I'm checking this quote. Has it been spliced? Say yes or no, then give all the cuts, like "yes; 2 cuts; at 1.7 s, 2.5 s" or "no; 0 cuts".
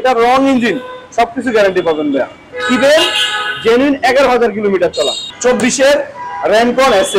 yes; 1 cut; at 5.2 s